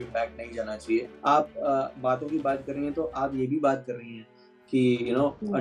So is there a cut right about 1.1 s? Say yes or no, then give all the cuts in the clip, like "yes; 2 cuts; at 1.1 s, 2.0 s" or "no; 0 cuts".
yes; 1 cut; at 1.1 s